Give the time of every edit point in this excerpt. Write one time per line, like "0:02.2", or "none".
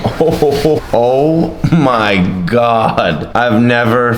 0:00.8
0:03.2